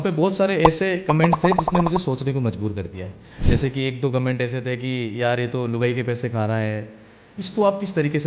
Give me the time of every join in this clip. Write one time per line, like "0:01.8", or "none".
0:07.3